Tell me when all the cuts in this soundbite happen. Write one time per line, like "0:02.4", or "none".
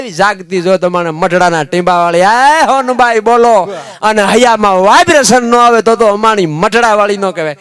none